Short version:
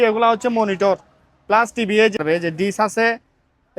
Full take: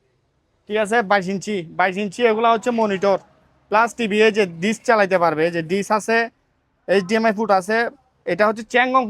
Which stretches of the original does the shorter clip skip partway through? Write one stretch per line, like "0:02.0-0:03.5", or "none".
0:04.4-0:05.3